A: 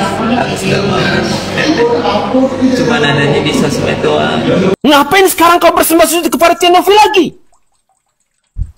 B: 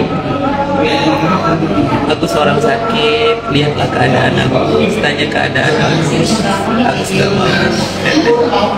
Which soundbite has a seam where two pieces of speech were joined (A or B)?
A